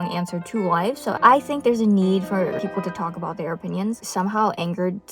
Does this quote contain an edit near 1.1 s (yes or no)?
yes